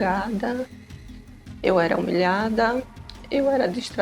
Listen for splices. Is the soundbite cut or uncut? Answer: uncut